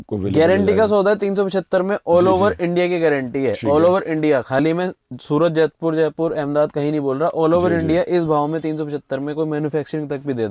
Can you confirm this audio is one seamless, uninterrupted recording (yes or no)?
yes